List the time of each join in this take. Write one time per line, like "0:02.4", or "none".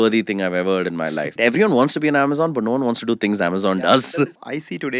0:01.3
0:04.1

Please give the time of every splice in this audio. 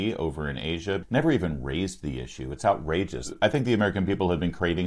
0:01.0
0:03.3

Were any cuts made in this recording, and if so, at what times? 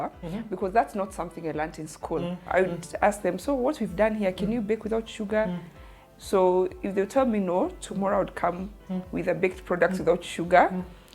0:02.4

